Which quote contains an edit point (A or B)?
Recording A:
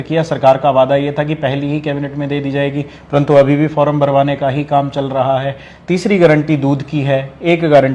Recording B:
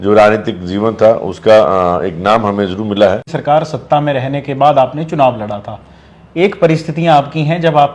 B